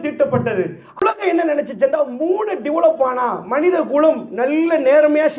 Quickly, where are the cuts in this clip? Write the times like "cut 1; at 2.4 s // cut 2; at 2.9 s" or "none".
cut 1; at 1.0 s